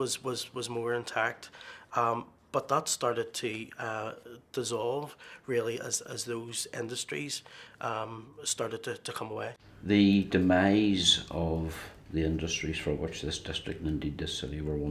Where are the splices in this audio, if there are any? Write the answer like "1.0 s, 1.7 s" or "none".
2.1 s